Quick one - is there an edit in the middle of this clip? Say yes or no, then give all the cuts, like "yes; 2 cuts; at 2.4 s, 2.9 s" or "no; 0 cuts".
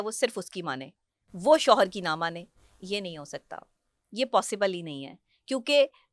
no; 0 cuts